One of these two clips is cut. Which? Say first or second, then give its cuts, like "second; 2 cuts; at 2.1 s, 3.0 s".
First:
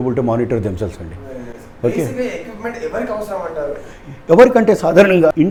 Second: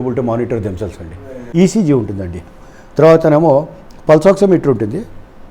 second; 1 cut; at 1.4 s